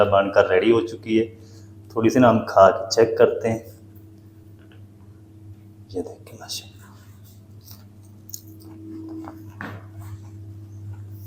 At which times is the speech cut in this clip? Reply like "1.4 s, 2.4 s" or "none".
none